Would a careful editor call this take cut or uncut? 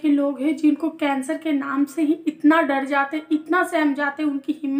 uncut